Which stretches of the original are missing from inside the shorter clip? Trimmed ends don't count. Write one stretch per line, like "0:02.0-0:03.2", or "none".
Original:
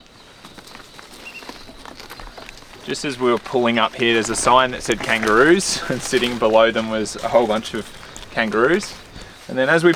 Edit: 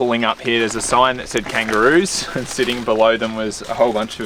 none